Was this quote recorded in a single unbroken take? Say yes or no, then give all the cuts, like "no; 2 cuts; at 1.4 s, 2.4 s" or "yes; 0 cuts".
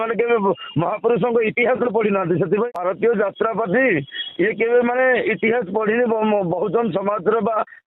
no; 1 cut; at 2.7 s